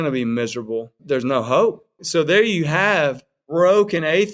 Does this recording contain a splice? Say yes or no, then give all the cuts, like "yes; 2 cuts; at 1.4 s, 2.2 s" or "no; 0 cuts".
yes; 2 cuts; at 0.9 s, 1.9 s